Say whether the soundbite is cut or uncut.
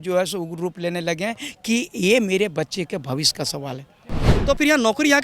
cut